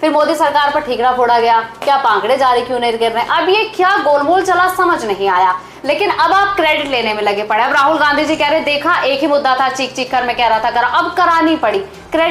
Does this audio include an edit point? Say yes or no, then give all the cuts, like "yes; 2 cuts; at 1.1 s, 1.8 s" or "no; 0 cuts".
no; 0 cuts